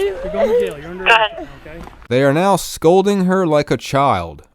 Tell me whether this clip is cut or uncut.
uncut